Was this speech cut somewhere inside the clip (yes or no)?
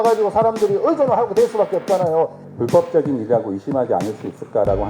yes